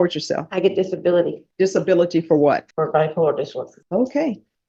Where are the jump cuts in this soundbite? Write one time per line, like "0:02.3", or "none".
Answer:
0:01.4
0:02.7
0:03.8